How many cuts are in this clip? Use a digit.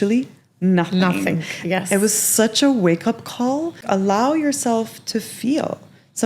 1